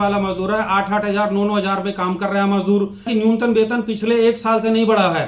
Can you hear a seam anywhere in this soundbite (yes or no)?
yes